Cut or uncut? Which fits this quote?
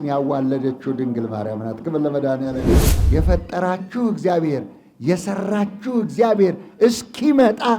cut